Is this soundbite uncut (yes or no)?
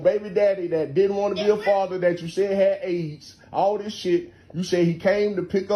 yes